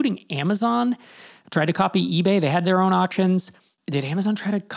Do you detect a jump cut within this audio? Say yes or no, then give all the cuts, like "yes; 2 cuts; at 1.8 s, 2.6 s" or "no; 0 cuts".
no; 0 cuts